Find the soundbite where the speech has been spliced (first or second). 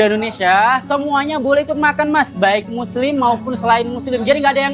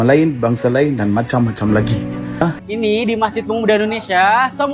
second